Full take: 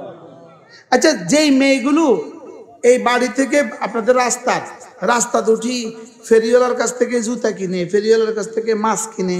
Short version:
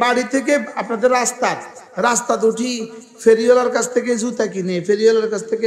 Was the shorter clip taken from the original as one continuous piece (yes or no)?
yes